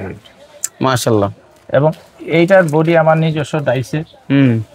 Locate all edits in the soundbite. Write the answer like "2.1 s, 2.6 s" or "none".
none